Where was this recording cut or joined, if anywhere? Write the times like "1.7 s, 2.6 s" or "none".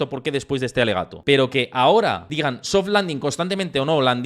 1.1 s, 2.2 s